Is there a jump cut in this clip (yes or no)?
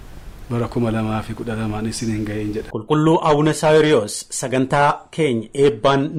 no